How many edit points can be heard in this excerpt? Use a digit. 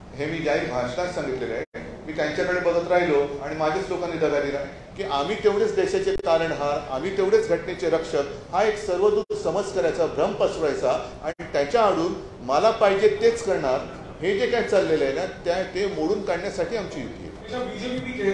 2